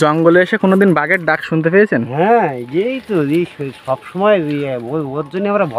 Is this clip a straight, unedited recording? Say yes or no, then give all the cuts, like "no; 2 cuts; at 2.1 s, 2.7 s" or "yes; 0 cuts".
yes; 0 cuts